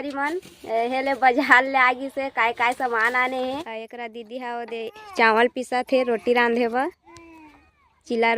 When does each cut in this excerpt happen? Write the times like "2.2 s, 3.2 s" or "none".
3.5 s